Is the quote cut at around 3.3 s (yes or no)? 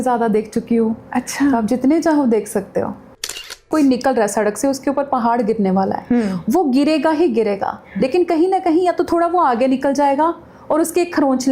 yes